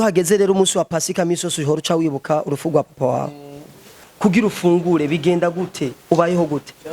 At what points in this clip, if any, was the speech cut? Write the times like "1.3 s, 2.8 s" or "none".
3.8 s

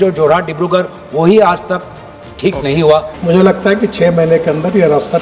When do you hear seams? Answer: 3.1 s

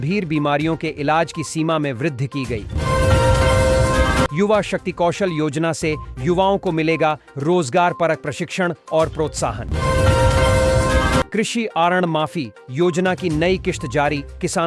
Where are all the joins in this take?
none

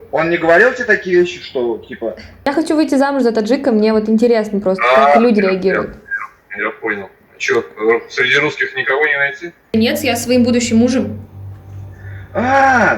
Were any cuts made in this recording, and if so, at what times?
2.5 s, 9.7 s

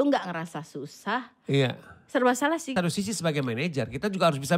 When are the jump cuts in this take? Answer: 2.7 s

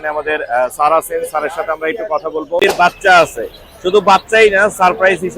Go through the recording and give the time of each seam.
2.6 s

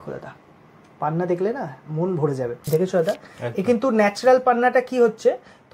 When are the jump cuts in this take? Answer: 2.6 s

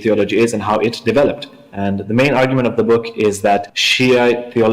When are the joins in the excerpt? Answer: 1.5 s, 3.8 s

